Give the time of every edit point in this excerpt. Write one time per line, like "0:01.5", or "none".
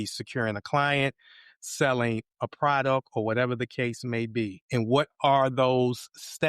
0:04.6